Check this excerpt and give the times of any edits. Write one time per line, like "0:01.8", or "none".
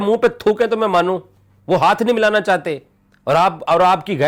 none